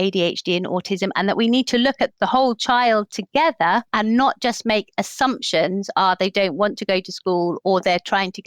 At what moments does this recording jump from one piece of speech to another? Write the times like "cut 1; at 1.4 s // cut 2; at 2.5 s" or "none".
cut 1; at 3.9 s // cut 2; at 7.6 s